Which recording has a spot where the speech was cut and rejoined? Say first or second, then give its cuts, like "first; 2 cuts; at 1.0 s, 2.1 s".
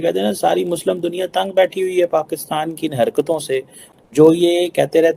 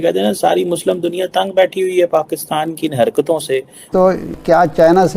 second; 1 cut; at 3.8 s